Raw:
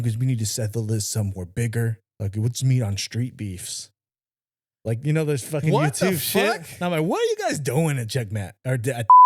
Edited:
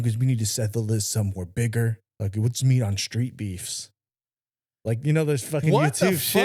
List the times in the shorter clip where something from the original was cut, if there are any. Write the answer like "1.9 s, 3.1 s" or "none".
none